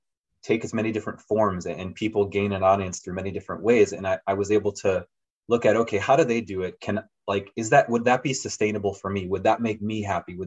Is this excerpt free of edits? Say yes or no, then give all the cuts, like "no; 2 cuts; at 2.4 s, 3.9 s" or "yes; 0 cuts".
yes; 0 cuts